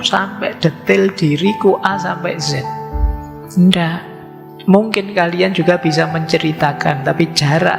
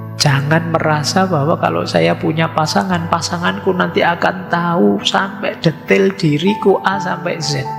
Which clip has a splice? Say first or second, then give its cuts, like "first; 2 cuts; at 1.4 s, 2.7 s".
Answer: first; 1 cut; at 4.5 s